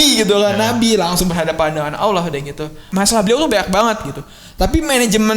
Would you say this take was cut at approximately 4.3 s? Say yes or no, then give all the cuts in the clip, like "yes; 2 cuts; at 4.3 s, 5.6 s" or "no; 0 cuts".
no; 1 cut; at 2.8 s